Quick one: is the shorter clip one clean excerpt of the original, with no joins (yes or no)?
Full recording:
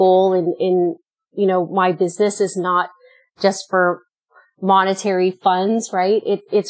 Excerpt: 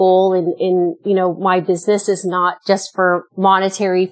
no